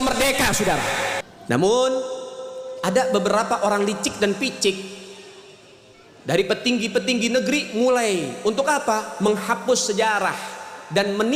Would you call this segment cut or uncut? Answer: cut